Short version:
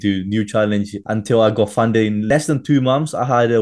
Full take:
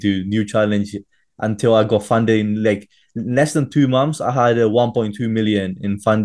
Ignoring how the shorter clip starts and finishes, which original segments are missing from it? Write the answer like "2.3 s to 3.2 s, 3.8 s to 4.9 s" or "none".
1.0 s to 1.3 s, 2.6 s to 3.3 s